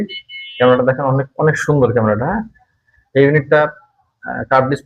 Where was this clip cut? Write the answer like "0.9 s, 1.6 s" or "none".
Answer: none